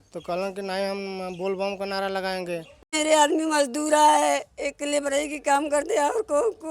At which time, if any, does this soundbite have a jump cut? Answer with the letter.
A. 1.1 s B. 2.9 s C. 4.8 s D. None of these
B